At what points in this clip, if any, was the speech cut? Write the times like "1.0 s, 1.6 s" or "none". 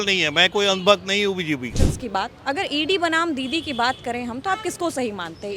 1.9 s